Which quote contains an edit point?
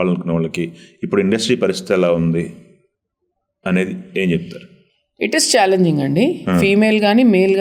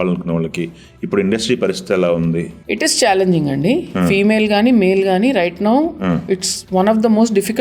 second; 1 cut; at 2.6 s

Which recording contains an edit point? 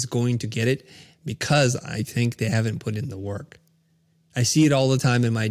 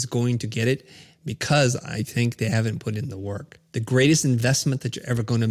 second; 1 cut; at 3.5 s

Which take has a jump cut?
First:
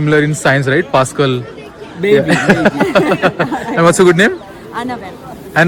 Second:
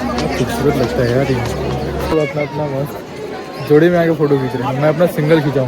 second; 1 cut; at 2.1 s

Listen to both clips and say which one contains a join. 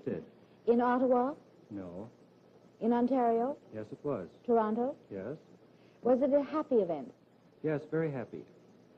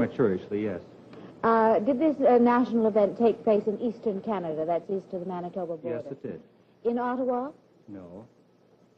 second; 1 cut; at 2.9 s

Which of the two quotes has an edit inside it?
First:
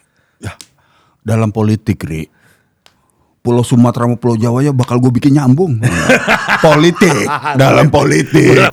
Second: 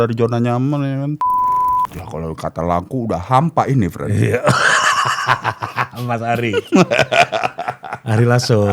second; 1 cut; at 1.9 s

